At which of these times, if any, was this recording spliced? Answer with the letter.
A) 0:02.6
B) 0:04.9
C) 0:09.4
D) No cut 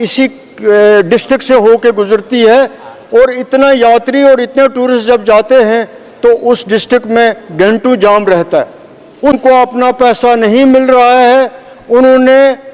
C